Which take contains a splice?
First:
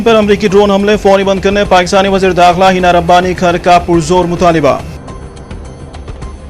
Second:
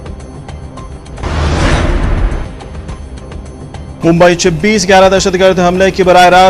second; 1 cut; at 1.1 s

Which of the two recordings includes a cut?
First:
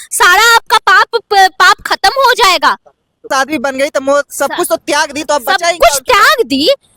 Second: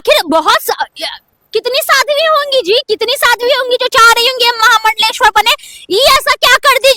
first; 1 cut; at 3.3 s

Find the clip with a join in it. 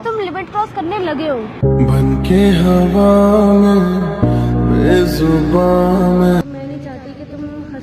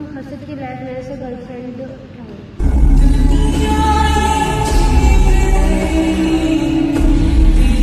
first; 1 cut; at 6.5 s

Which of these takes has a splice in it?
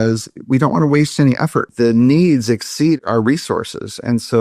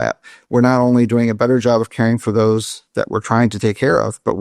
first; 2 cuts; at 1.7 s, 3.0 s

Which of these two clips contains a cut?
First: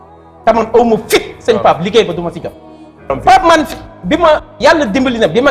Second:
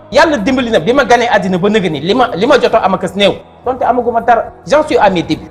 first; 1 cut; at 3.1 s

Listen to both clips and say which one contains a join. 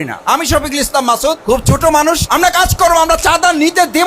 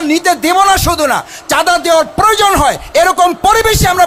first; 2 cuts; at 1.4 s, 2.2 s

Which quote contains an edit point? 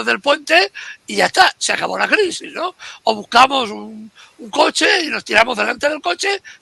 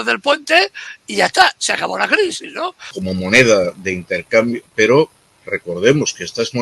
second; 1 cut; at 2.9 s

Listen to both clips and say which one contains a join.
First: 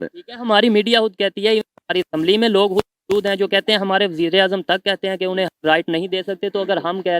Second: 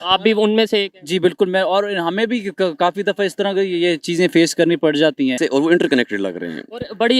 second; 1 cut; at 5.4 s

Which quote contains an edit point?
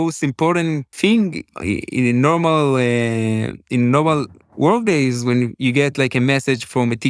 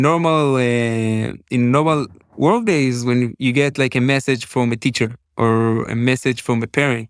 first; 1 cut; at 0.9 s

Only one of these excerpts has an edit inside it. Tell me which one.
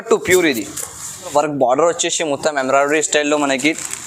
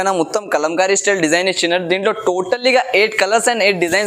first; 1 cut; at 1.3 s

